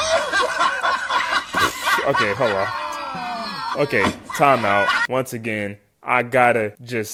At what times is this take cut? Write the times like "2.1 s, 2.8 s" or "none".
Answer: none